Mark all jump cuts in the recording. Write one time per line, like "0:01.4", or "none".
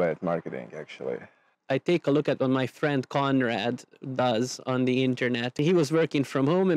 0:01.5
0:05.6